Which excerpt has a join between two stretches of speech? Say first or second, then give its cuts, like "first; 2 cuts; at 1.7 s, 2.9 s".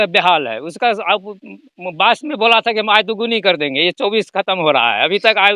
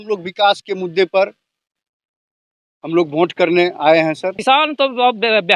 second; 1 cut; at 4.4 s